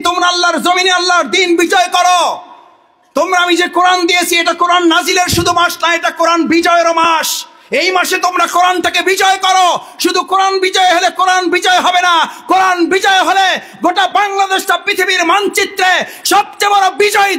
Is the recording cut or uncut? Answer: uncut